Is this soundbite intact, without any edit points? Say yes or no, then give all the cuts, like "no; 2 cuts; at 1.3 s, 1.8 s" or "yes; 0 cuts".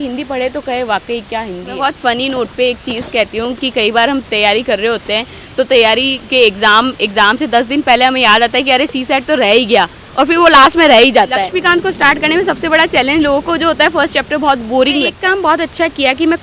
no; 3 cuts; at 1.7 s, 11.5 s, 15.1 s